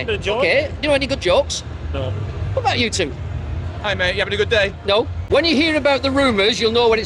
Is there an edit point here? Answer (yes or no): yes